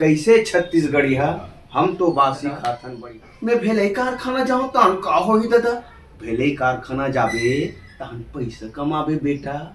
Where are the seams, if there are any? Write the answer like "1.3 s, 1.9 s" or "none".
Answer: 2.8 s